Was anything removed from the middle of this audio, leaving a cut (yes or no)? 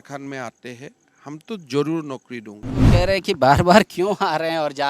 yes